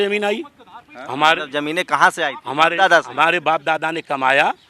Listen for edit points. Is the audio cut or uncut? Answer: uncut